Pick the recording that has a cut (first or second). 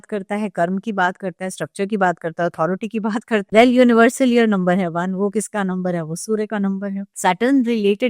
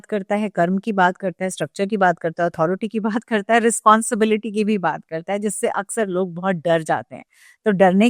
first